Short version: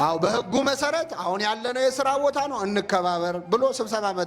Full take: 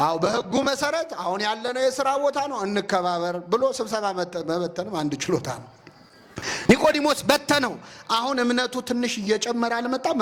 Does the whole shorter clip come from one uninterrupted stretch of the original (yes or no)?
yes